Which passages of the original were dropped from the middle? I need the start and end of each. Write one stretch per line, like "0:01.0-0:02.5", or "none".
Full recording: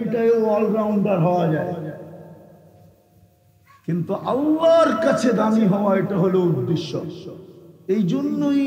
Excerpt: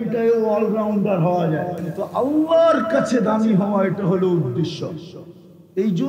0:01.9-0:04.0